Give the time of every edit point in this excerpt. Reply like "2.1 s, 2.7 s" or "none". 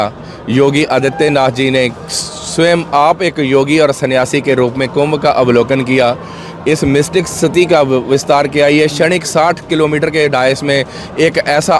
none